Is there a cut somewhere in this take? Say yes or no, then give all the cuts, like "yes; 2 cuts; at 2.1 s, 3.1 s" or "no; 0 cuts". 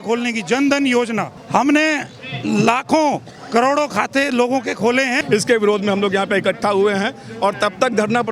yes; 2 cuts; at 1.3 s, 5.2 s